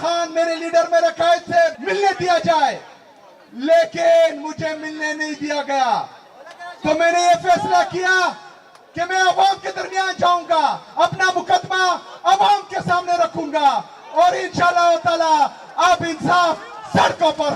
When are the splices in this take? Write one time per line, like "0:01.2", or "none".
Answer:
0:01.8